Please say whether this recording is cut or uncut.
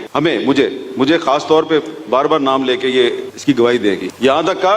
uncut